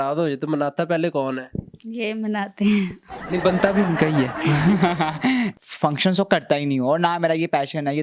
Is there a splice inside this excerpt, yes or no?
yes